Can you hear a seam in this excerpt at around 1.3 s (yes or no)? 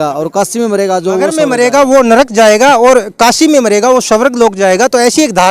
yes